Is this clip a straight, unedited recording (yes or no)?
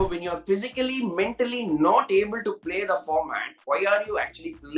yes